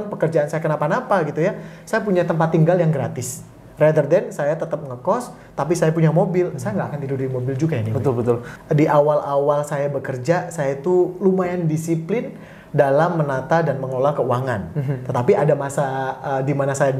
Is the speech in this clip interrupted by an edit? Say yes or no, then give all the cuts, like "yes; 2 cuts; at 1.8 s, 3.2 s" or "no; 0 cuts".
yes; 1 cut; at 8.5 s